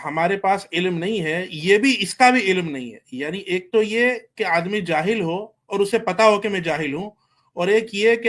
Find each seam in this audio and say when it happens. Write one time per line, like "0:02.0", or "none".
none